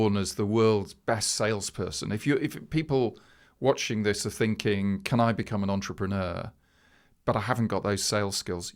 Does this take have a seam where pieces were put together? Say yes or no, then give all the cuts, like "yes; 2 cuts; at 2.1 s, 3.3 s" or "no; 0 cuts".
no; 0 cuts